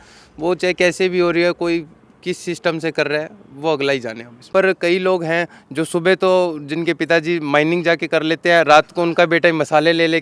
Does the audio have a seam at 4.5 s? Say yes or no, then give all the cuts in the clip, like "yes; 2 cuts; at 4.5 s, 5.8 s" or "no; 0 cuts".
yes; 1 cut; at 4.5 s